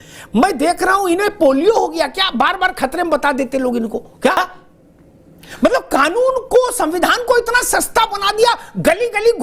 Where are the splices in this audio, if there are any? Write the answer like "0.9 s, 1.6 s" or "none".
4.3 s